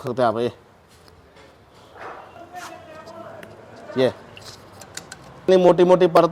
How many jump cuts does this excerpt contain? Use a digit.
2